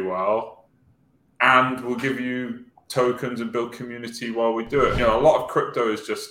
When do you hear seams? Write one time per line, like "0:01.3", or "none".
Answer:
0:05.0